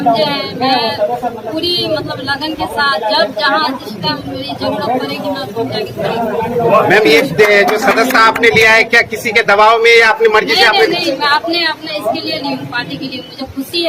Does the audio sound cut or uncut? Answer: uncut